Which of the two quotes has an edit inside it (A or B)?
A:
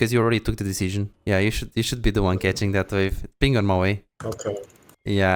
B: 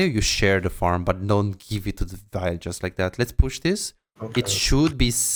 A